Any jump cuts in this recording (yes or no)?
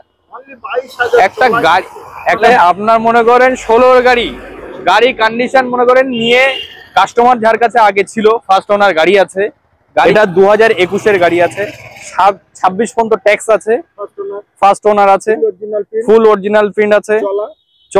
yes